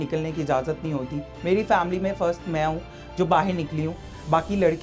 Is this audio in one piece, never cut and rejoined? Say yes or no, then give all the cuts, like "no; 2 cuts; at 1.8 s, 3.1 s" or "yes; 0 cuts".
yes; 0 cuts